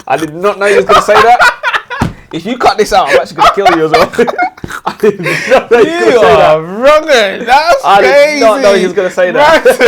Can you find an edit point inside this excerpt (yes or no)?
no